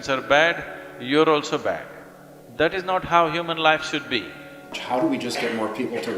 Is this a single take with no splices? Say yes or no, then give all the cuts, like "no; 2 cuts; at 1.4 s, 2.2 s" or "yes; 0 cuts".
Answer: no; 1 cut; at 4.8 s